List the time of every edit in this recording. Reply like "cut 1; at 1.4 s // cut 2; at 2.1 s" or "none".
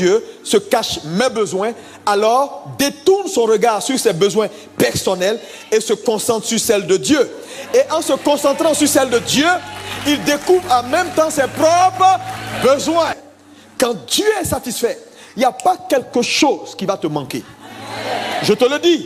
cut 1; at 13.3 s